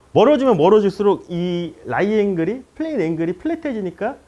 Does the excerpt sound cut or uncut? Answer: uncut